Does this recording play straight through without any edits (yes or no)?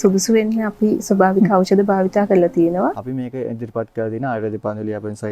no